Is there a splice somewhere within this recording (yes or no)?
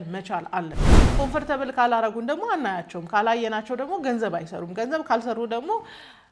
yes